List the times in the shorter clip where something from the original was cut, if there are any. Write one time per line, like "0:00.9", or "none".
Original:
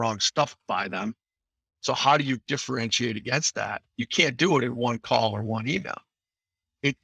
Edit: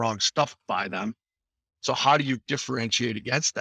none